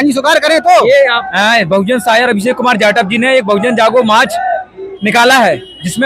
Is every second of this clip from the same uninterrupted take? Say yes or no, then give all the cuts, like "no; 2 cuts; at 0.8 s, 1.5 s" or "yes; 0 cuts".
no; 1 cut; at 1.2 s